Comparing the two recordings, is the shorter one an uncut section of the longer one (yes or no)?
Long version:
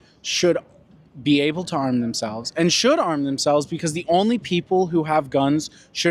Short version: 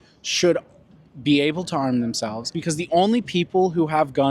no